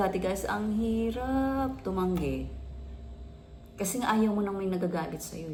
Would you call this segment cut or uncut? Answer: uncut